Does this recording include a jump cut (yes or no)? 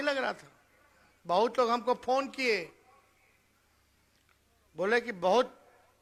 no